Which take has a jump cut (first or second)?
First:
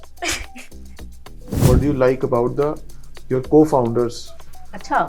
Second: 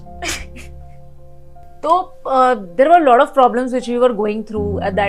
first